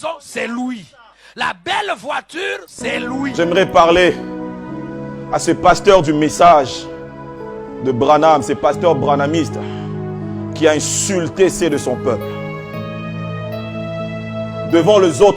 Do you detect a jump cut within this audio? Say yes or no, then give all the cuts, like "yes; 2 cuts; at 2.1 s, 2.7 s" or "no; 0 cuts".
yes; 1 cut; at 3.3 s